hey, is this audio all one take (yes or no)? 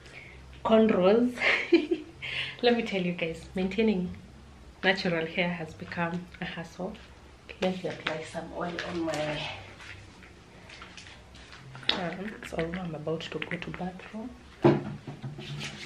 no